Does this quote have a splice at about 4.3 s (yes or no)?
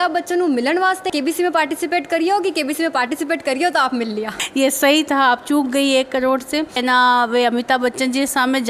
yes